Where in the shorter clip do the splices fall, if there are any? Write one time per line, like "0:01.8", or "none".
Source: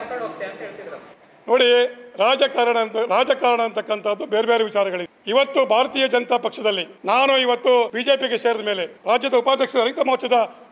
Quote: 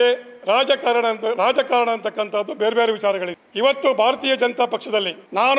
none